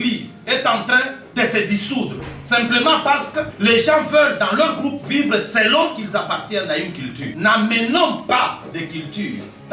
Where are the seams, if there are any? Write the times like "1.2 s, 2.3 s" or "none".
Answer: 3.5 s, 7.3 s